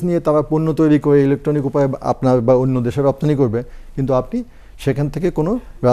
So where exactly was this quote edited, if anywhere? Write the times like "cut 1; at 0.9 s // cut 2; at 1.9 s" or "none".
none